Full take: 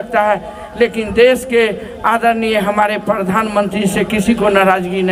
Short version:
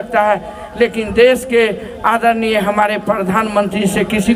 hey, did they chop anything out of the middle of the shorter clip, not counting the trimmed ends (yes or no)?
no